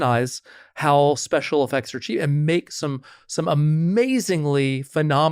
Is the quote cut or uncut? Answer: uncut